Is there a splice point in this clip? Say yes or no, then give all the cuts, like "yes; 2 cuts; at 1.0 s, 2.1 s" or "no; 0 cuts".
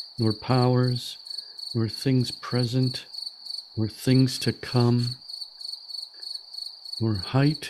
yes; 2 cuts; at 5.2 s, 7.0 s